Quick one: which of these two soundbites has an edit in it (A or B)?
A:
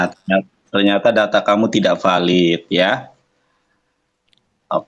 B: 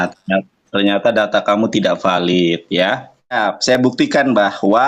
B